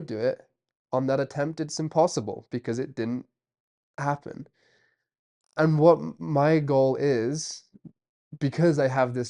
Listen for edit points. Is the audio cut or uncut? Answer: uncut